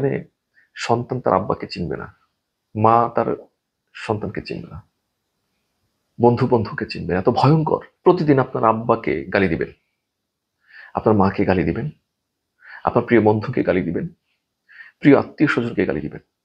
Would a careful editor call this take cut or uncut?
cut